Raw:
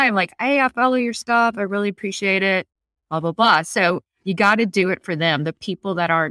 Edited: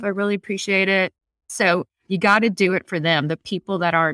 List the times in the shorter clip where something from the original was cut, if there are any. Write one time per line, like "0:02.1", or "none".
0:01.5